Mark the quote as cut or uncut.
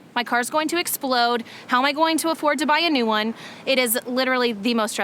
uncut